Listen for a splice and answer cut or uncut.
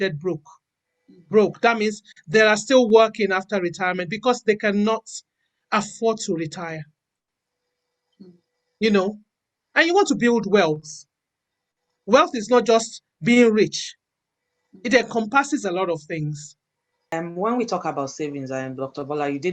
cut